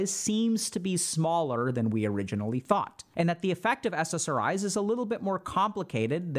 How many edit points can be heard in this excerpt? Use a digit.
1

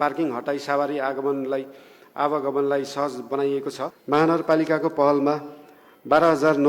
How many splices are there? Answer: 1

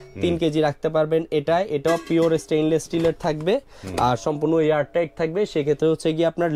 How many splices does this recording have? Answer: 0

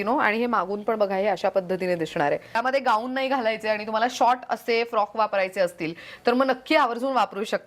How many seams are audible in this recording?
1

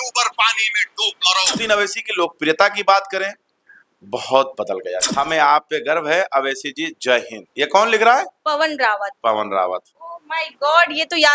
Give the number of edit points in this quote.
3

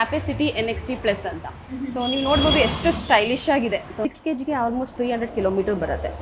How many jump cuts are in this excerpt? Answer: 1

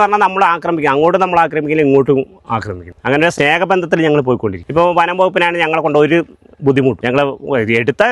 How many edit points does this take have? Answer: 3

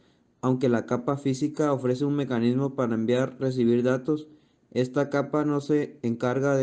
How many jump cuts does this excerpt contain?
1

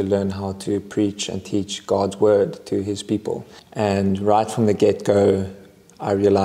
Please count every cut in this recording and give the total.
1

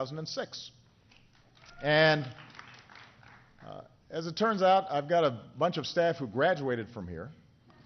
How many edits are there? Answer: 0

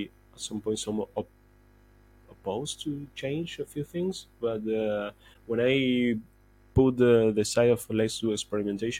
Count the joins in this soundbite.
0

